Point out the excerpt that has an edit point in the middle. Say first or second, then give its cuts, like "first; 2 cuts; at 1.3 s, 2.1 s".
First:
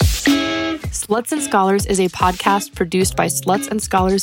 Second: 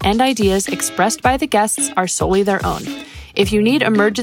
first; 1 cut; at 0.9 s